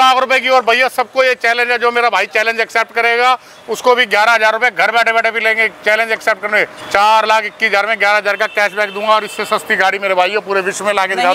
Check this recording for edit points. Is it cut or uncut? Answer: uncut